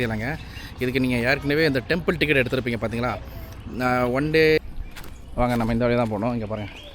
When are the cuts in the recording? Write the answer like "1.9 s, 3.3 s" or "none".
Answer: 4.6 s

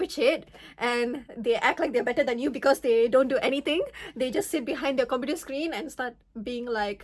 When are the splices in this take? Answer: none

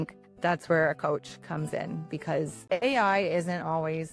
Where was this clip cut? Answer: 2.6 s

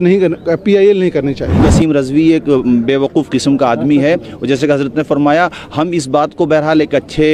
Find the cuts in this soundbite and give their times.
1.6 s

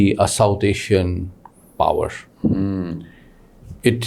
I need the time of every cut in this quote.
none

